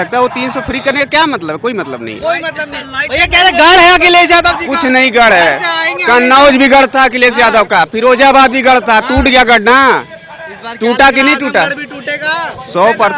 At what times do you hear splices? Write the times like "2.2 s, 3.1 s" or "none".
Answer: none